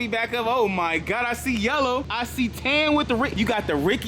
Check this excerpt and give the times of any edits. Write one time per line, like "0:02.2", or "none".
0:02.1
0:03.3